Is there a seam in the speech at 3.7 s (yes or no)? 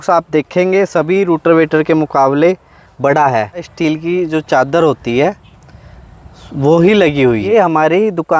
yes